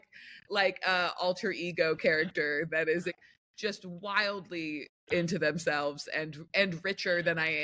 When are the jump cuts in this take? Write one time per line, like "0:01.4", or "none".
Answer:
0:03.2